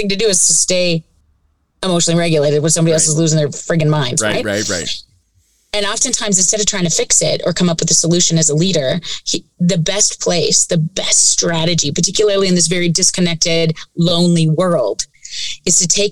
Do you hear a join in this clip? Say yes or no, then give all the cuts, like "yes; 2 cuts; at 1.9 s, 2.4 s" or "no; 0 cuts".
no; 0 cuts